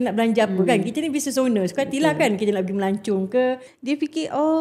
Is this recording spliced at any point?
yes; 1 cut; at 3.7 s

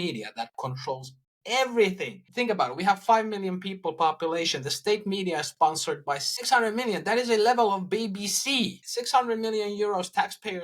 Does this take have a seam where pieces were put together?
yes; 3 cuts; at 2.1 s, 6.3 s, 8.8 s

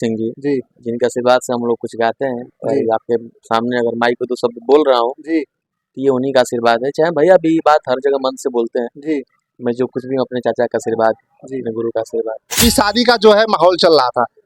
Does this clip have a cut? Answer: yes; 1 cut; at 12.6 s

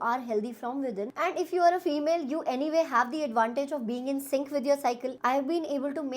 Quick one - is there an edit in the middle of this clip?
yes; 2 cuts; at 1.1 s, 5.2 s

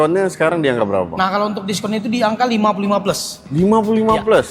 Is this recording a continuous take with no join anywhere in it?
yes; 0 cuts

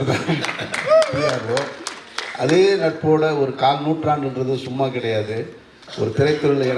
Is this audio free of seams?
yes; 0 cuts

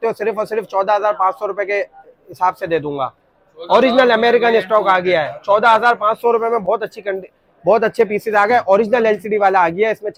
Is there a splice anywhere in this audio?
no; 0 cuts

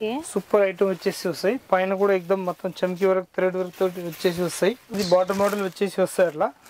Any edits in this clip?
yes; 1 cut; at 4.8 s

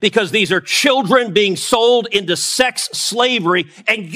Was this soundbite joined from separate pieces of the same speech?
no; 0 cuts

